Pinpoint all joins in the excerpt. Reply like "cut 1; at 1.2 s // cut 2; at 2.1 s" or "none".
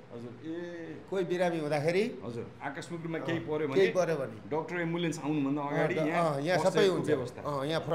none